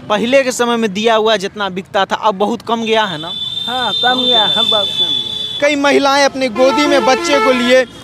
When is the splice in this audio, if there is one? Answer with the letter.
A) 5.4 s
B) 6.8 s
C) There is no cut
A